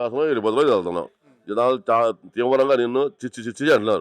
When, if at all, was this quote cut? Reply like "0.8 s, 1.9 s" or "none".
none